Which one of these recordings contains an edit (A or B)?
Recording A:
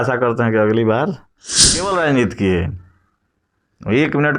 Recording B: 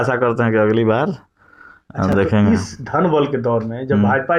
A